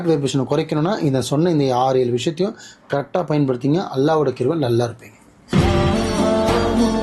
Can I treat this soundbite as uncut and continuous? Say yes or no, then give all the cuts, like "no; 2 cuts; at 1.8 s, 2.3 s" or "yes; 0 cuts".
no; 1 cut; at 5.4 s